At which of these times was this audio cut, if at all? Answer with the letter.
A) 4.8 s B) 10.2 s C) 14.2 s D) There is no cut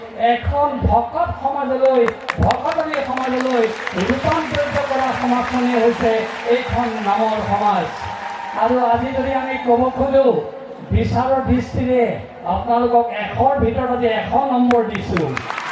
D